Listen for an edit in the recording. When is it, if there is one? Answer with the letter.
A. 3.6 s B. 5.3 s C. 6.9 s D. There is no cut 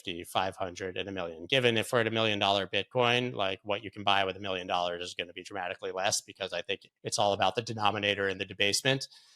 C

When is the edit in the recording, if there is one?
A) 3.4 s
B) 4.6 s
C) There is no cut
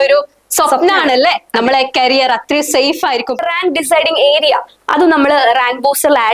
A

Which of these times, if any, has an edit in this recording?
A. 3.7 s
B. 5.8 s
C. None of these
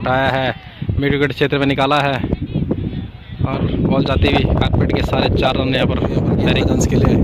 C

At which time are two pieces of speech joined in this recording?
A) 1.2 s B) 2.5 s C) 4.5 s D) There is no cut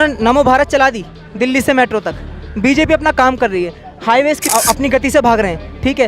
C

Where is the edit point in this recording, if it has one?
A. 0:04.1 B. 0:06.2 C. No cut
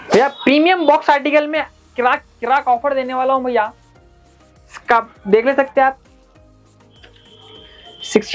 C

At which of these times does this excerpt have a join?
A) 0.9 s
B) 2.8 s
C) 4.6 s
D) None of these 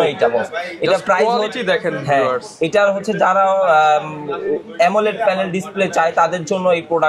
D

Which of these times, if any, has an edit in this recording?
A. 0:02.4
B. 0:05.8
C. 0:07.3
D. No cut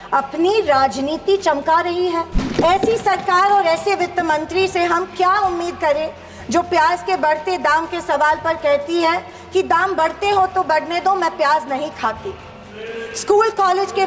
A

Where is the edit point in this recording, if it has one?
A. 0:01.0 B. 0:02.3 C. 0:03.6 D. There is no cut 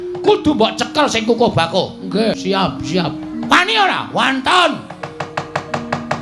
B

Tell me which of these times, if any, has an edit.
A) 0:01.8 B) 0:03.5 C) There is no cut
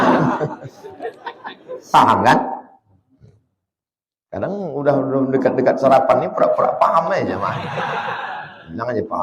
A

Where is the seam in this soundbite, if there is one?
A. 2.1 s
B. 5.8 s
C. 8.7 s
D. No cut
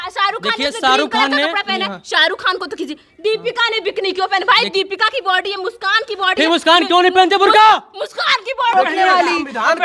C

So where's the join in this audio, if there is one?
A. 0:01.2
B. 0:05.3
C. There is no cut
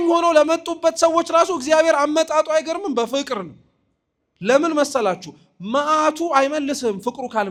C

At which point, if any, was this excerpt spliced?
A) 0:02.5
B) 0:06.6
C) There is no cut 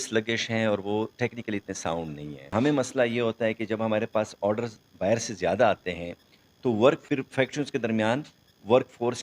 A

